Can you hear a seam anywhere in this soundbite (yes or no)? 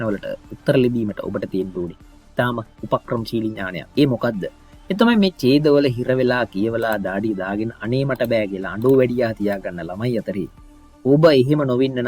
yes